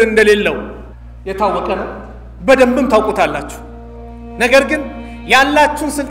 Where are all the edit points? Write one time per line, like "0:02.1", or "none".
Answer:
none